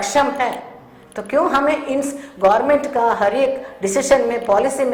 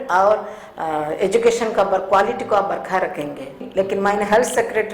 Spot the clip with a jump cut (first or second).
second